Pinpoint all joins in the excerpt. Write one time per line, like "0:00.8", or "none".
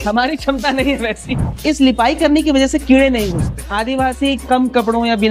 0:01.5
0:03.6